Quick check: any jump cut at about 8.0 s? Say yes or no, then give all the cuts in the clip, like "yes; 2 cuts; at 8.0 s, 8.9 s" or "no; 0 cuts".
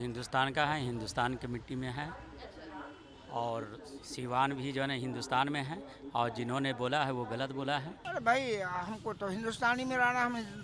yes; 1 cut; at 8.0 s